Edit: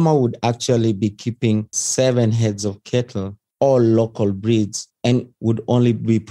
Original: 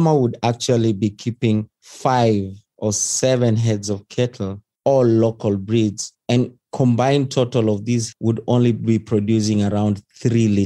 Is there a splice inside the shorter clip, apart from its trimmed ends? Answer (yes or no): yes